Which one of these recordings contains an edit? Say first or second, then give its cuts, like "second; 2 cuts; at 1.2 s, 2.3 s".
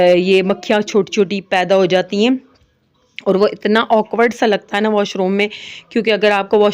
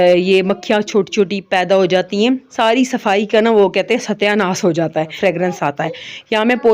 second; 2 cuts; at 2.5 s, 5.1 s